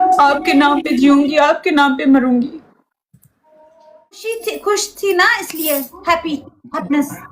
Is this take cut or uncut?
cut